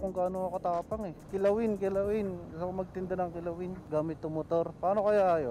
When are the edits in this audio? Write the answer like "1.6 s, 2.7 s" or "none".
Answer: 1.2 s, 3.8 s, 4.7 s